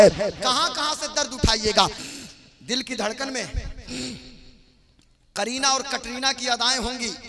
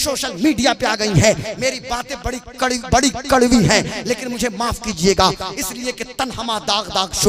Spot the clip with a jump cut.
first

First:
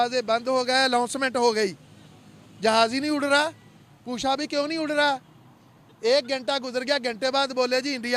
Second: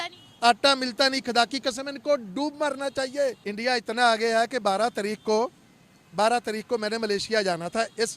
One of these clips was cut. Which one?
second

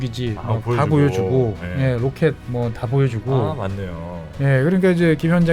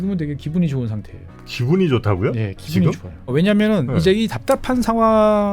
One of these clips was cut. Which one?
second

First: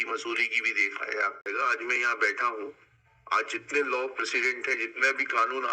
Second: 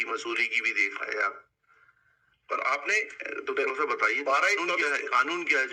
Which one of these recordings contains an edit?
first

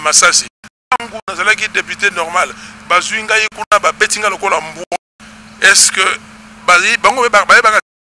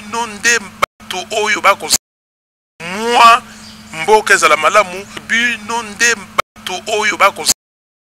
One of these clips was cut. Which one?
second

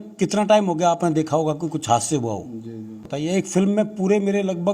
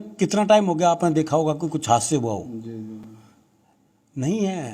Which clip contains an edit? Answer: first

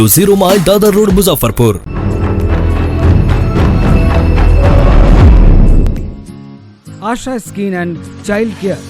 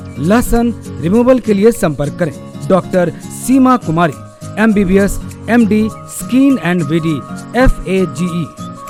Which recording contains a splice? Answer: first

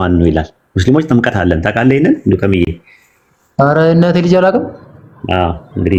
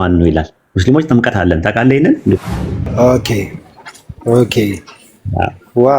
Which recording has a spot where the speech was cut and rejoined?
second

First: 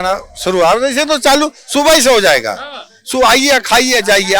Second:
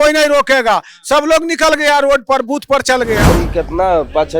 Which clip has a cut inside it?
second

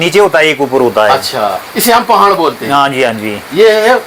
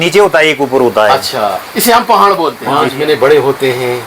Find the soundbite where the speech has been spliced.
second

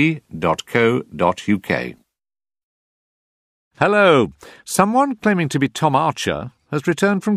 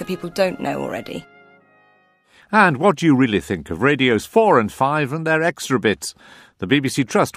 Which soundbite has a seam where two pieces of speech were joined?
second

